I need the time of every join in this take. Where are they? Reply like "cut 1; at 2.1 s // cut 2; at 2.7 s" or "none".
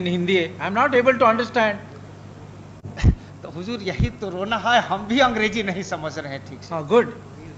none